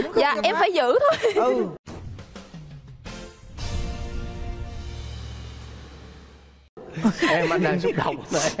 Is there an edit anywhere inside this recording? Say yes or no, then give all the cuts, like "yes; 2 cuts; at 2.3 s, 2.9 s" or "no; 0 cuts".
no; 0 cuts